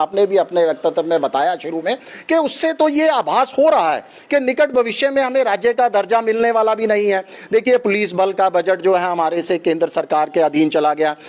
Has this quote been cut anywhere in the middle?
no; 0 cuts

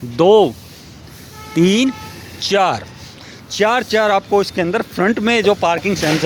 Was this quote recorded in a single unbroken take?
yes; 0 cuts

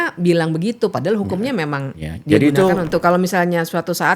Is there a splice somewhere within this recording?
yes; 1 cut; at 2.9 s

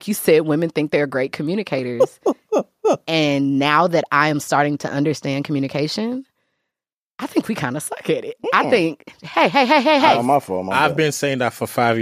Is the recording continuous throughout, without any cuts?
yes; 0 cuts

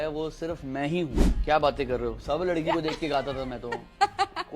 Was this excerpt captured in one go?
no; 1 cut; at 1.3 s

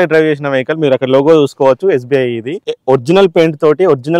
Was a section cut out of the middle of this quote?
yes; 1 cut; at 2.7 s

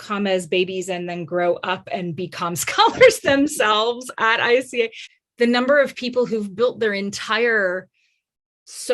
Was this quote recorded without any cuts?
no; 1 cut; at 5.0 s

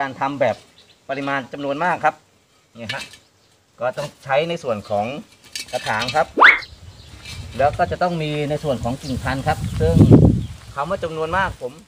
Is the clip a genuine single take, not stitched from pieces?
yes; 0 cuts

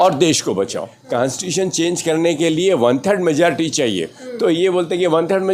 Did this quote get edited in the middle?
yes; 1 cut; at 1.0 s

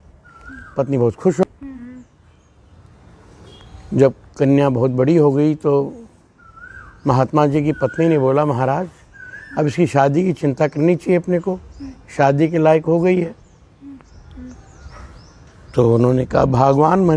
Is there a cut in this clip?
yes; 1 cut; at 1.4 s

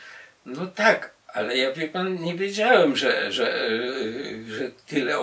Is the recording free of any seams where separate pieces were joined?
yes; 0 cuts

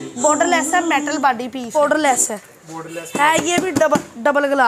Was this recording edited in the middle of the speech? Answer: yes; 1 cut; at 1.8 s

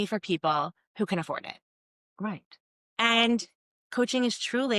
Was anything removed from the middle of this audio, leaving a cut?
yes; 1 cut; at 3.7 s

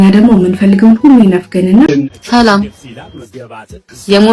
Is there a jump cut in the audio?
yes; 1 cut; at 1.9 s

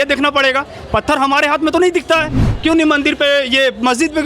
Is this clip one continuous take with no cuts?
no; 1 cut; at 2.4 s

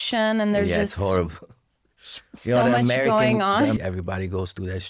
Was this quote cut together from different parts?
yes; 1 cut; at 3.8 s

